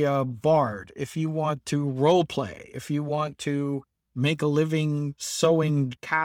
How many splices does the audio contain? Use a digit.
0